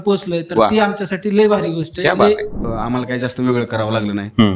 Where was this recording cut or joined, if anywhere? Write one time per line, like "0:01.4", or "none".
0:02.7